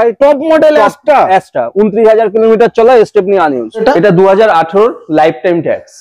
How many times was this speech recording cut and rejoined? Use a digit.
1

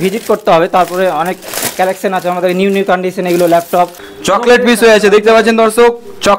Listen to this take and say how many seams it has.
1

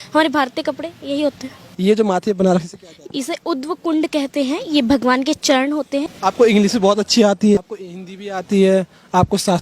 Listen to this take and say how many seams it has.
3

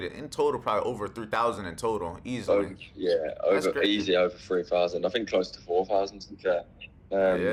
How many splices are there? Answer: 0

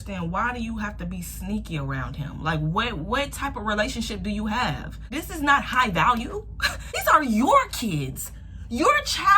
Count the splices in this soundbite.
2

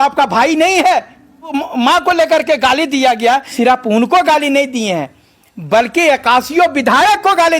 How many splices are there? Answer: 2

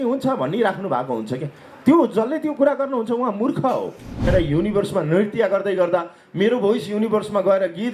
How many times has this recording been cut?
1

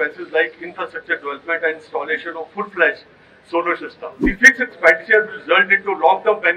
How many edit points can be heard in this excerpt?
1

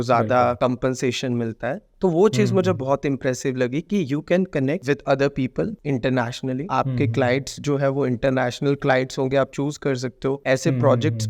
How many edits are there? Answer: 0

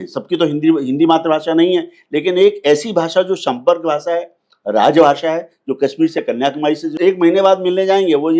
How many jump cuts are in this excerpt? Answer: 1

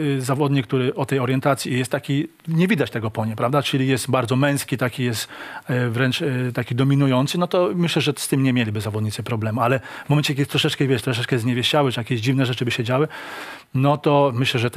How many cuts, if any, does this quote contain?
0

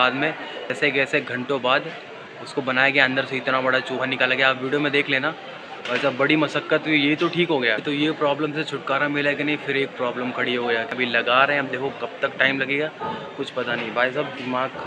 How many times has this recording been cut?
2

